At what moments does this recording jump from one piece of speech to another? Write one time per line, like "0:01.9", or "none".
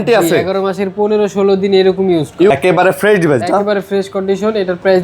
0:02.5

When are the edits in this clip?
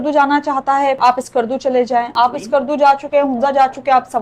0:01.0
0:02.1

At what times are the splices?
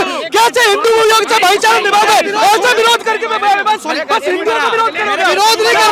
none

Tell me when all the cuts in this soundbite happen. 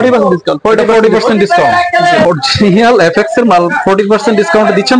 0:02.2

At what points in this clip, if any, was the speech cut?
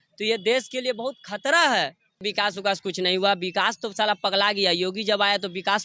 0:02.2

